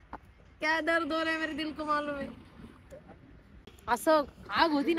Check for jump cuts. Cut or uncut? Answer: cut